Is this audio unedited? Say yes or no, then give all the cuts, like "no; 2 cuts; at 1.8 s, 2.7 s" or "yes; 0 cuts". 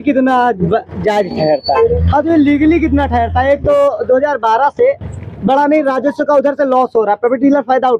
yes; 0 cuts